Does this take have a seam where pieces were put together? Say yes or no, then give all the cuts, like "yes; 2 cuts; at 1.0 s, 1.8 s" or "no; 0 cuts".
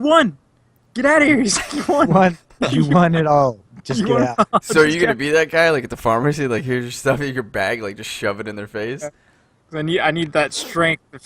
yes; 1 cut; at 7.4 s